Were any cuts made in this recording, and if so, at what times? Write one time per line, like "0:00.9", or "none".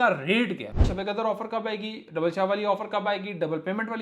0:00.9